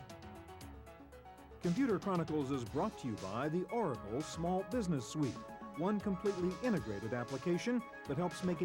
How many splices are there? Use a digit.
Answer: 1